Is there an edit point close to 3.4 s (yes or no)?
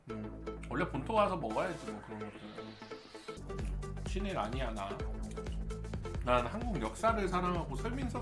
yes